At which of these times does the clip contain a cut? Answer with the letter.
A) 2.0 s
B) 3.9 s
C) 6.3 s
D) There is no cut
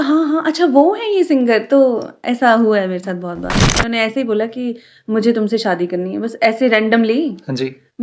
B